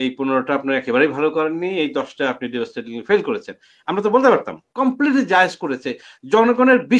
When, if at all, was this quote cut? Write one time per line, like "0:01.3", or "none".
0:04.6